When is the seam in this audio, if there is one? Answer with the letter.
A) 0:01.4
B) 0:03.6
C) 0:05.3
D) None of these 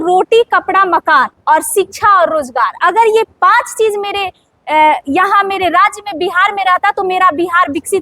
A